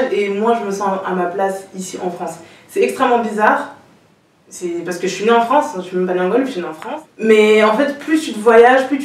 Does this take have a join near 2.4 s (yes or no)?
no